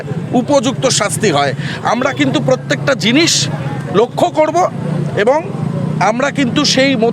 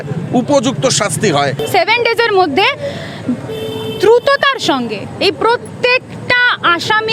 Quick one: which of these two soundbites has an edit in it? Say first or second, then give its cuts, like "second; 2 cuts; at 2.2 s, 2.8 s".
second; 1 cut; at 1.6 s